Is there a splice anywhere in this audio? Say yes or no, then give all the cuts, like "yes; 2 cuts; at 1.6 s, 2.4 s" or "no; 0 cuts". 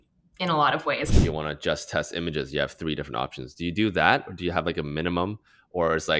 yes; 1 cut; at 1.1 s